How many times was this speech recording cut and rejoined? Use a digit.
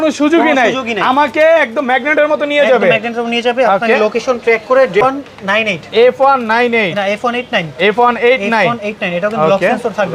1